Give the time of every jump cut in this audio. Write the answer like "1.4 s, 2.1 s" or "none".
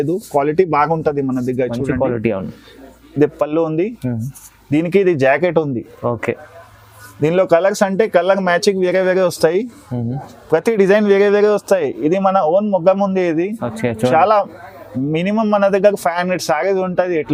none

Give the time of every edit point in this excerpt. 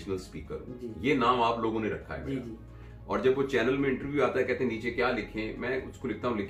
none

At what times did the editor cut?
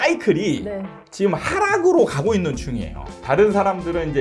3.1 s

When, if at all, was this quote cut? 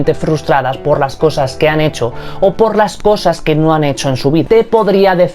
4.4 s

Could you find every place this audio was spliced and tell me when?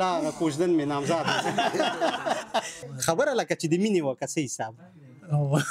2.8 s

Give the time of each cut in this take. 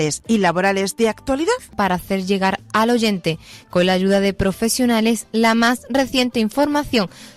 1.7 s

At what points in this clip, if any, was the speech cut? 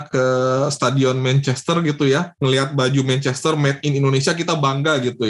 none

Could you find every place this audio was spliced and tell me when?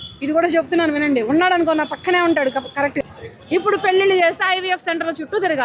3.0 s

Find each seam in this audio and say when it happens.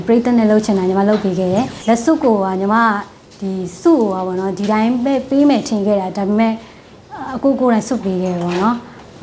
1.7 s

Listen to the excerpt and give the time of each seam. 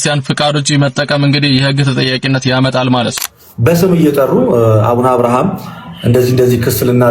3.2 s

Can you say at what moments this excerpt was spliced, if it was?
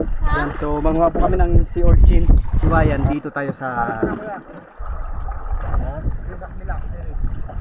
2.9 s

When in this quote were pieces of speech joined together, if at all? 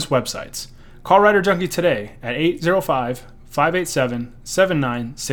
none

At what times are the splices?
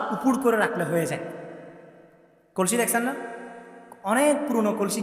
none

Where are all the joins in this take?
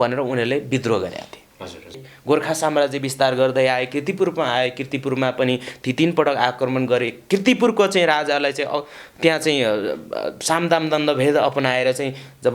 2.1 s

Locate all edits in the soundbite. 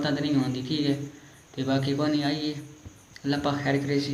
none

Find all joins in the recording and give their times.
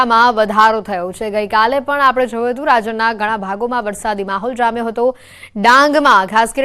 1.2 s

